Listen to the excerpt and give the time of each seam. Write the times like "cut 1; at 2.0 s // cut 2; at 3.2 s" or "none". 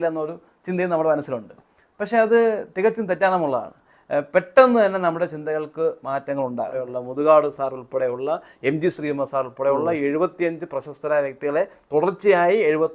cut 1; at 6.8 s